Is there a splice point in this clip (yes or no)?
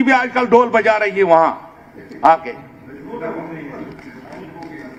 no